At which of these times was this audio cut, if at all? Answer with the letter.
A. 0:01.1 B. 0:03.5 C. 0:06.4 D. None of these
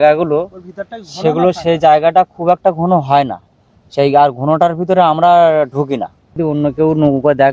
C